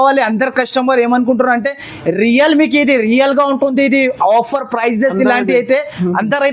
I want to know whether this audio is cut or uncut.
uncut